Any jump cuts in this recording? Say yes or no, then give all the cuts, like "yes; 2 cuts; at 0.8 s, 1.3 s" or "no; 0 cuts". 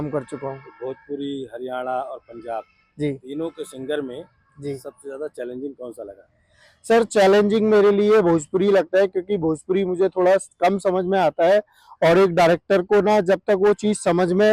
no; 0 cuts